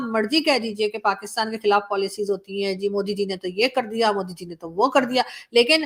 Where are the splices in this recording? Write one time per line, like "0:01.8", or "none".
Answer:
none